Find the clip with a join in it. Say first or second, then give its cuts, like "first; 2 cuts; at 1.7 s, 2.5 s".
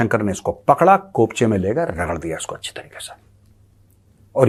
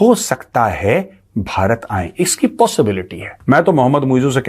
second; 1 cut; at 3.3 s